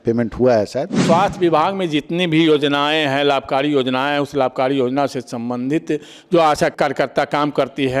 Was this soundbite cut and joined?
yes; 2 cuts; at 1.0 s, 6.7 s

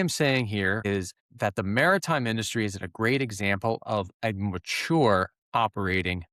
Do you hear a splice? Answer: yes; 1 cut; at 0.9 s

